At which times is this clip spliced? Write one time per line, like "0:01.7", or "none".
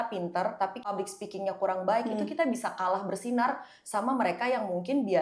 0:00.9